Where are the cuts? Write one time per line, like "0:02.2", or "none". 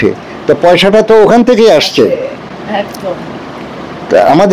none